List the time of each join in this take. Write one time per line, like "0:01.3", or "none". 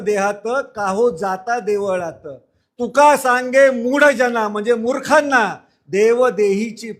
none